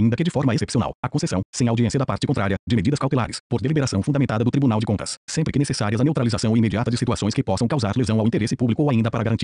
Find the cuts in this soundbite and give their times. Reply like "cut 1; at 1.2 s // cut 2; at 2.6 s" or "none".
none